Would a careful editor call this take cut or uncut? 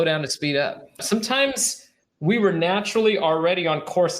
cut